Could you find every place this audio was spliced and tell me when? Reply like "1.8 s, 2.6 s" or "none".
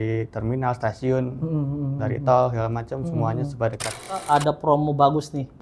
4.2 s